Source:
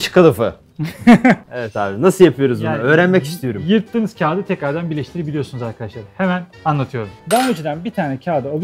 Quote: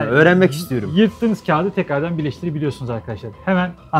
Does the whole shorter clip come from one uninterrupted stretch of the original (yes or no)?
yes